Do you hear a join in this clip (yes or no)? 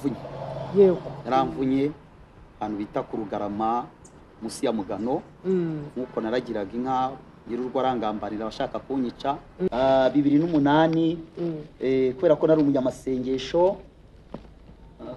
yes